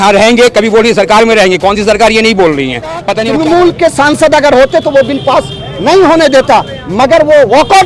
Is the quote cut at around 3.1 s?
yes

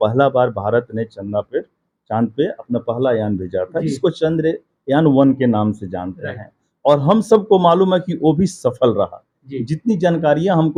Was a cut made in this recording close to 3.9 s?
no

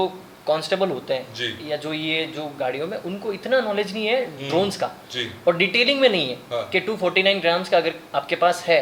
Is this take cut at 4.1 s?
no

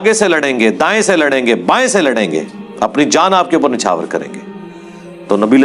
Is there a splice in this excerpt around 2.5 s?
no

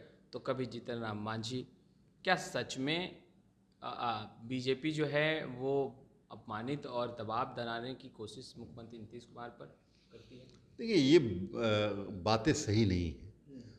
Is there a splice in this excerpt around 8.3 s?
no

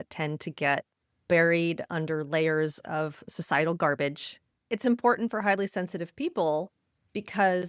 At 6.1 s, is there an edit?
no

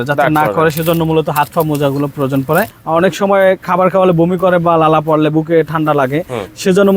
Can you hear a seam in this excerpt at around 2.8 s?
yes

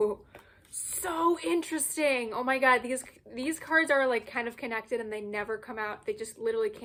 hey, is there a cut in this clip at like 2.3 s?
no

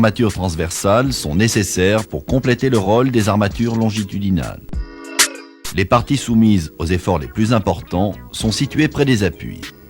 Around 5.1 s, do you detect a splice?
yes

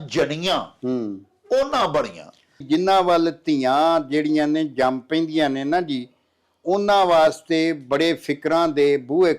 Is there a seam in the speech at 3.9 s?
no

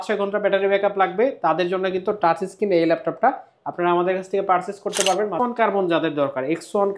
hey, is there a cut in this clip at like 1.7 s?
no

